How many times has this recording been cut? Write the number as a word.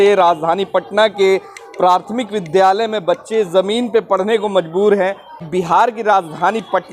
one